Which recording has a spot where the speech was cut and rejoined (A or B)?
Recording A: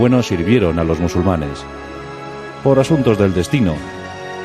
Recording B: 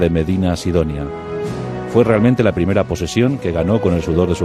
A